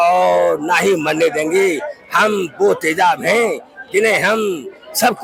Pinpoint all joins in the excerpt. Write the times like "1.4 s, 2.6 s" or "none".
none